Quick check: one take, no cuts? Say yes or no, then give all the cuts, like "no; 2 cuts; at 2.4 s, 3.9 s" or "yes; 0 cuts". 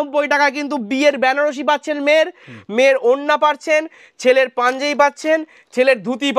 yes; 0 cuts